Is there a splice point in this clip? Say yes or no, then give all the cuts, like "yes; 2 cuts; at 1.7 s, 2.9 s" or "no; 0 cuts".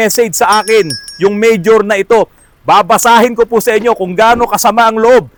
no; 0 cuts